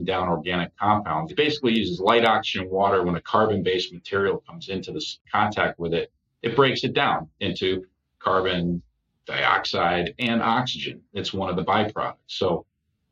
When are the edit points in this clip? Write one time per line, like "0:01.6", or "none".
0:01.3
0:05.2